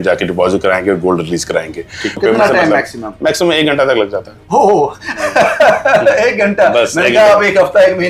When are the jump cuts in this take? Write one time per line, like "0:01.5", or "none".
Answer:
0:02.2